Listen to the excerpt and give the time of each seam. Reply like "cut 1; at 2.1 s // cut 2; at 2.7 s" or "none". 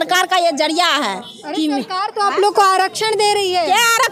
none